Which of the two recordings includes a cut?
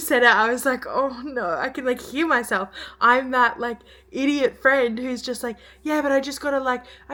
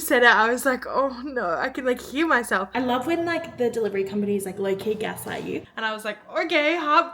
second; 2 cuts; at 2.7 s, 5.6 s

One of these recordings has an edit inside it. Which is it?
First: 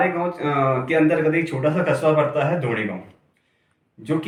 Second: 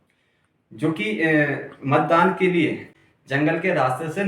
second; 1 cut; at 2.9 s

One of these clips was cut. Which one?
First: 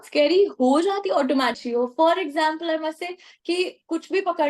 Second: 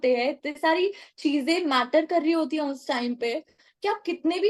first; 1 cut; at 1.6 s

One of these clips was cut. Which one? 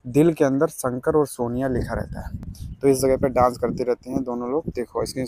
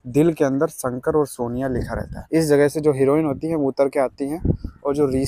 second; 1 cut; at 2.3 s

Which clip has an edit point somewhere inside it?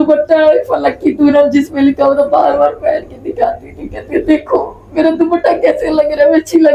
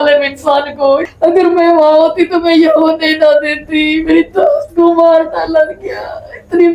second; 1 cut; at 1.1 s

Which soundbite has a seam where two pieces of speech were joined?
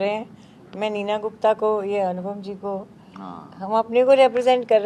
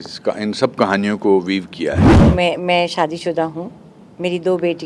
second; 1 cut; at 2.1 s

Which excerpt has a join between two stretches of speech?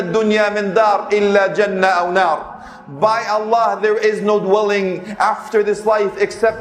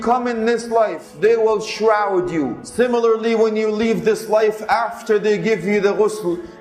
second; 2 cuts; at 1.0 s, 2.6 s

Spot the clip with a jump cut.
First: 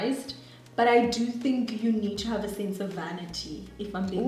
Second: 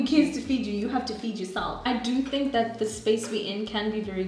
second; 1 cut; at 1.8 s

